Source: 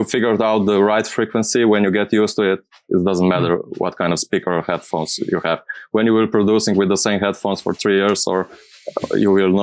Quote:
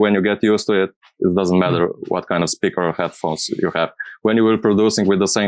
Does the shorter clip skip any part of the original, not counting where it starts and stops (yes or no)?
no